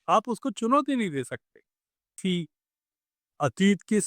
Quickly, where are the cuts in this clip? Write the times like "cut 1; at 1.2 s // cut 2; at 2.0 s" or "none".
cut 1; at 2.2 s